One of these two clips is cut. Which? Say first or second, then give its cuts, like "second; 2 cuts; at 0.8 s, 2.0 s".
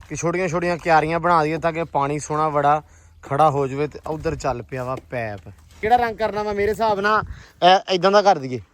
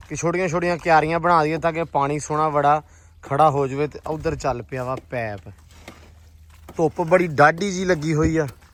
first; 1 cut; at 5.8 s